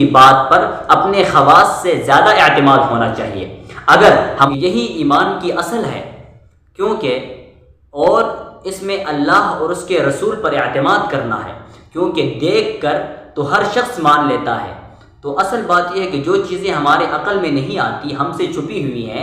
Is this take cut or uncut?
cut